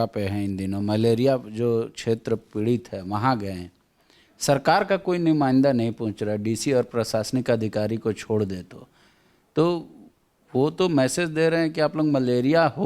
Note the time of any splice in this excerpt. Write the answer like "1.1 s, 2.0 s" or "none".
none